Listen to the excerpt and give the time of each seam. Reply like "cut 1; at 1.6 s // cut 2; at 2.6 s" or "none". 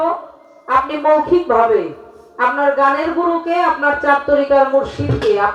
none